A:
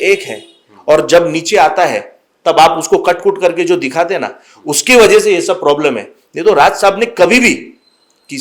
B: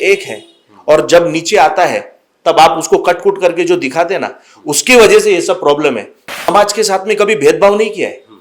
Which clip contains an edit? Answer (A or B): B